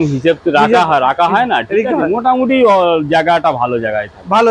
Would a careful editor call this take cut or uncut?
uncut